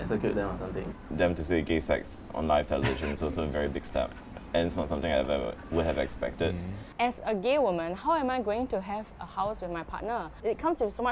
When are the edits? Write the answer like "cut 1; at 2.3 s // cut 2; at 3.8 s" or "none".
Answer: cut 1; at 1.0 s // cut 2; at 6.8 s // cut 3; at 10.4 s